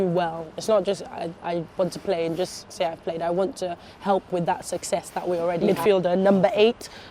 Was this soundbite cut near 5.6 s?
yes; 1 cut; at 5.6 s

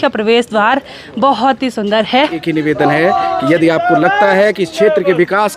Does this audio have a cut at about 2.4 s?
yes; 1 cut; at 2.4 s

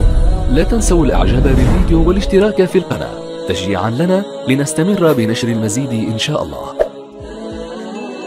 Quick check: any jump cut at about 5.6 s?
no; 1 cut; at 6.9 s

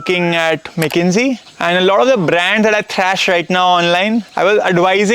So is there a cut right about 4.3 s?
yes; 2 cuts; at 1.5 s, 4.3 s

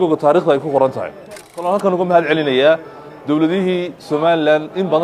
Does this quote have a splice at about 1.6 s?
yes; 1 cut; at 1.6 s

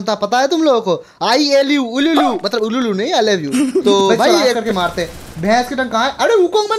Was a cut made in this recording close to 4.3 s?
yes; 1 cut; at 4.3 s

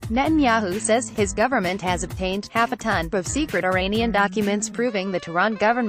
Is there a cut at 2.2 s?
no; 1 cut; at 0.9 s

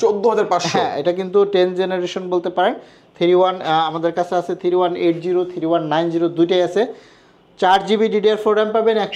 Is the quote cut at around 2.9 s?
no; 0 cuts

